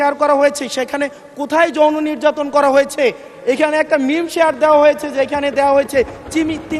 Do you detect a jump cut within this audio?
no; 0 cuts

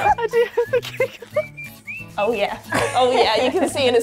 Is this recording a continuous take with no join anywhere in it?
no; 1 cut; at 2.1 s

